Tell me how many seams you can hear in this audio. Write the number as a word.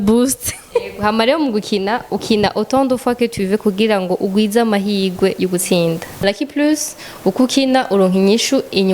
one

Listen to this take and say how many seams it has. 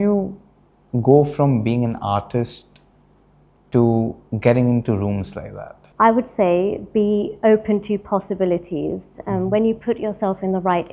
zero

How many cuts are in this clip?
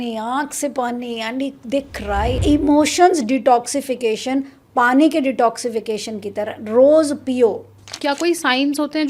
two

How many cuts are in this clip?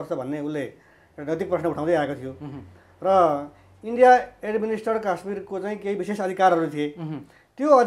zero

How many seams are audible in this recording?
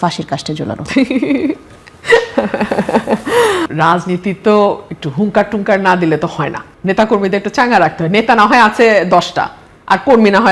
one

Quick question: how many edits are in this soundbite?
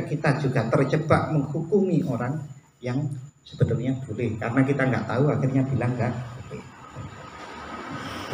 zero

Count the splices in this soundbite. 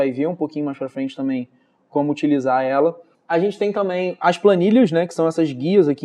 one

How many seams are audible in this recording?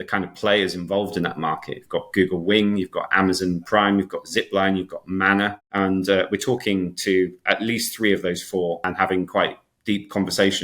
two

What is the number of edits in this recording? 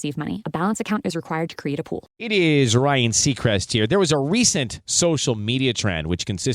one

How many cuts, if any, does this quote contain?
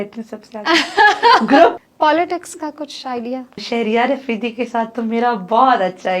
two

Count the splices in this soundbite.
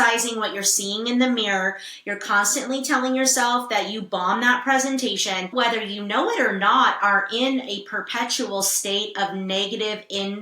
one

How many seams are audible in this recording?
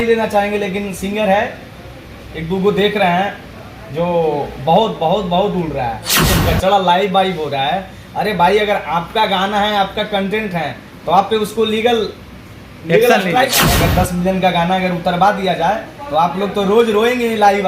two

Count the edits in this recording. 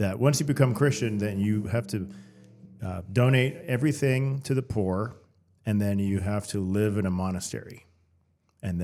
zero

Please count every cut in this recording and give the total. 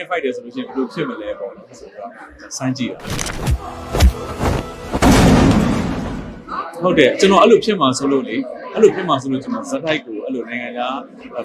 one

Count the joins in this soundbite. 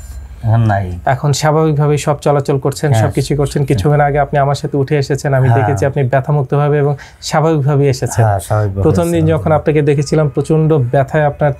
zero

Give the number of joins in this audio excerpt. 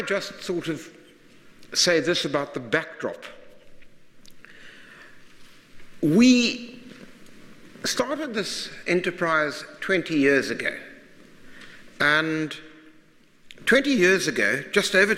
one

